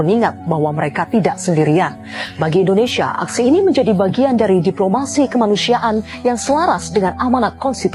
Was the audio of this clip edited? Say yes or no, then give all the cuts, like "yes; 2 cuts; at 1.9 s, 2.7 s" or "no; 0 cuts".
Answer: no; 0 cuts